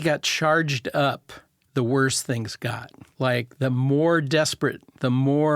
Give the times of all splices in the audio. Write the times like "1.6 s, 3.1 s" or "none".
3.0 s